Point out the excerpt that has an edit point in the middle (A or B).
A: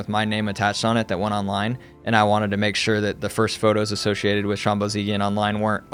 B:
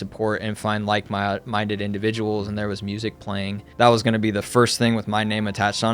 B